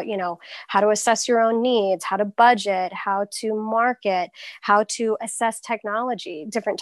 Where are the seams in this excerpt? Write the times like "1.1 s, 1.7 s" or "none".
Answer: none